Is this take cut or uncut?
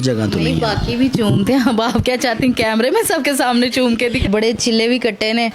cut